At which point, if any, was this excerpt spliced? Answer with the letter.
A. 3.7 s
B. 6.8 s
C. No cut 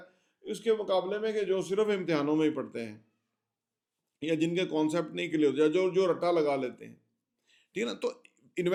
C